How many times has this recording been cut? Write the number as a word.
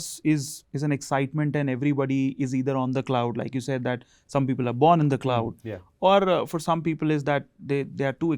zero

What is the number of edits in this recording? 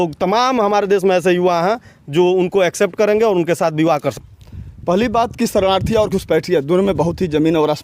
one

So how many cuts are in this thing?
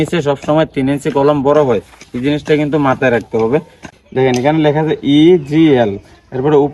one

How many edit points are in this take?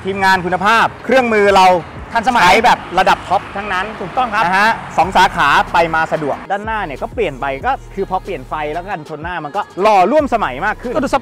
one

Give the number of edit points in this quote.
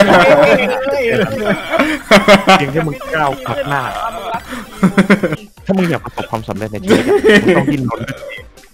one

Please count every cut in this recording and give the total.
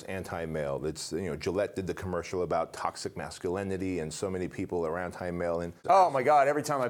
one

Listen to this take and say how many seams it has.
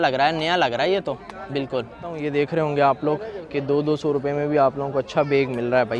one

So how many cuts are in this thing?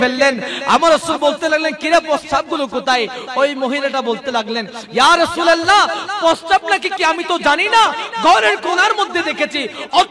zero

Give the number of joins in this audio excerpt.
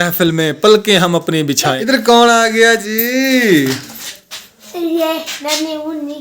one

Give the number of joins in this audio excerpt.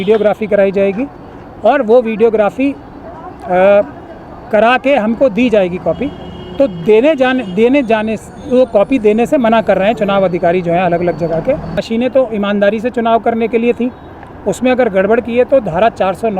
one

